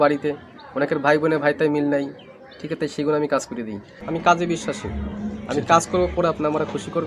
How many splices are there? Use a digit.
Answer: 1